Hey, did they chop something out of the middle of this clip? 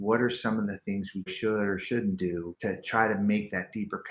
yes; 2 cuts; at 1.3 s, 2.5 s

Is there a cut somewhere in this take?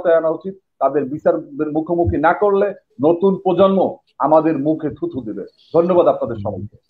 no; 0 cuts

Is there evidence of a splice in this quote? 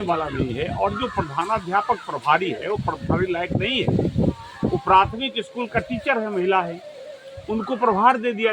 no; 0 cuts

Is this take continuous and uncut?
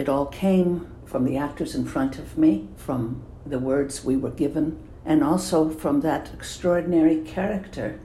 no; 3 cuts; at 0.9 s, 2.7 s, 4.9 s

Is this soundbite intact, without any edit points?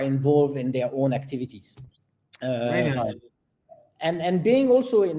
yes; 0 cuts

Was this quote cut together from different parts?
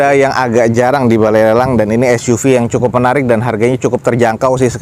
no; 0 cuts

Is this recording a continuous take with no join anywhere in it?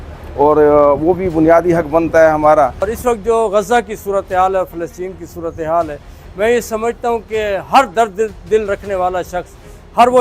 no; 1 cut; at 3.1 s

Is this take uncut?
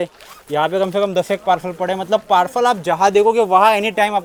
yes; 0 cuts

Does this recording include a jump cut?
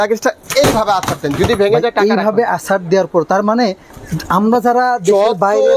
no; 0 cuts

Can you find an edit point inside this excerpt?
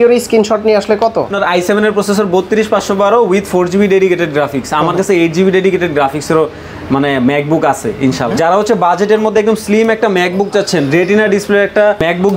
yes; 2 cuts; at 1.3 s, 8.3 s

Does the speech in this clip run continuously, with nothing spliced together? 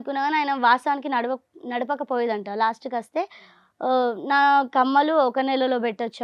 yes; 0 cuts

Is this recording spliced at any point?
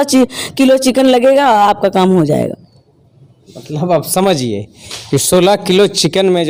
no; 0 cuts

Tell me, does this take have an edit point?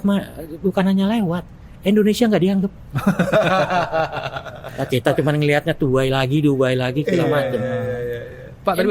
no; 0 cuts

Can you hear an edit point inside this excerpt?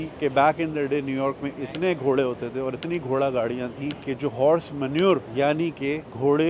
no; 0 cuts

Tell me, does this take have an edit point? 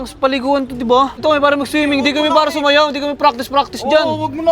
yes; 1 cut; at 1.2 s

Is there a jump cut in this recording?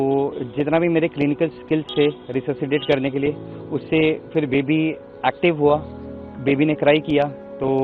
no; 0 cuts

